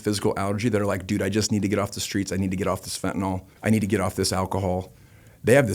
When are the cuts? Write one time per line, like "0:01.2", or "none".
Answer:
0:03.5